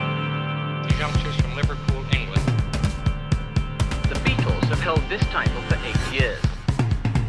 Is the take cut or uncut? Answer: uncut